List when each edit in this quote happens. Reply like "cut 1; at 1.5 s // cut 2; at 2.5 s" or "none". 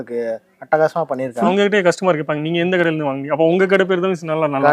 cut 1; at 1.5 s

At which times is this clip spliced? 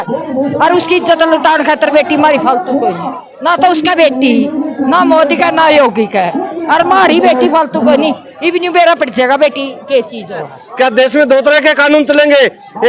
cut 1; at 10.6 s

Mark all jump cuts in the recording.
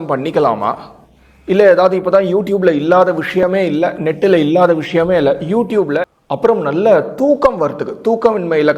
cut 1; at 6.0 s

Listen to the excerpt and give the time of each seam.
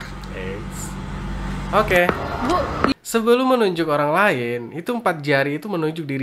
cut 1; at 3.0 s

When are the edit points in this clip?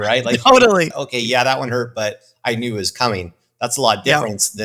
cut 1; at 0.9 s

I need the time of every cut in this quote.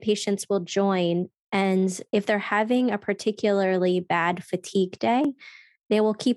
none

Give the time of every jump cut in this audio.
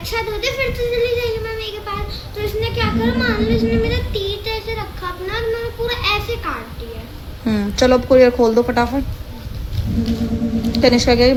none

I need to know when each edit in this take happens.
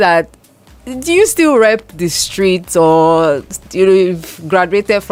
none

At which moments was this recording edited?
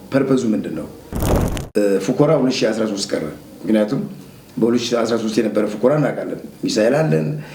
cut 1; at 1.2 s

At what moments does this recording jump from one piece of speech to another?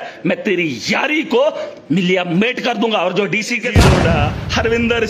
cut 1; at 3.9 s

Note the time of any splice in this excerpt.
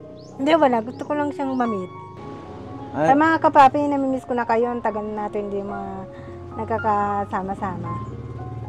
cut 1; at 2.1 s

